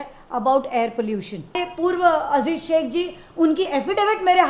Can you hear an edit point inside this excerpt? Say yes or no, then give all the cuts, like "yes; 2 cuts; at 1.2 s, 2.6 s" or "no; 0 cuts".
yes; 1 cut; at 1.6 s